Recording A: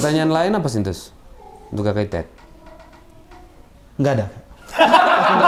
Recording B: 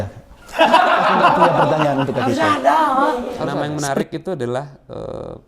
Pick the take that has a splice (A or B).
B